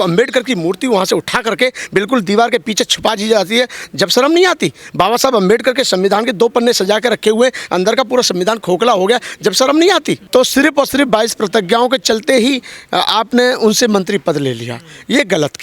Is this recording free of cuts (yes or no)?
no